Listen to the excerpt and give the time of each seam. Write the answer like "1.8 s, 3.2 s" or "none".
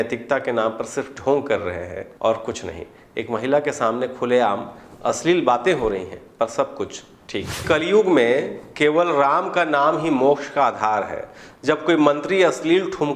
2.0 s, 7.6 s